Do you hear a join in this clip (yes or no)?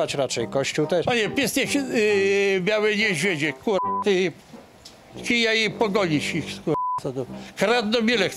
no